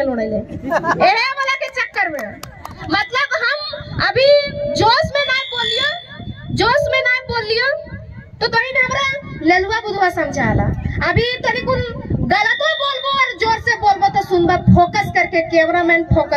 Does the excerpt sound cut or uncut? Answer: uncut